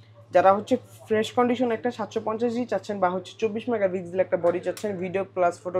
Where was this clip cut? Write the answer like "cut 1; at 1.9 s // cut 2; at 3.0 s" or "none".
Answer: none